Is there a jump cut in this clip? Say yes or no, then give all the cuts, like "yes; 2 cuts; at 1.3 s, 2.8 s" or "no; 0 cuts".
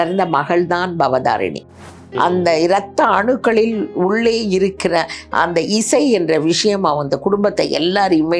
yes; 1 cut; at 1.8 s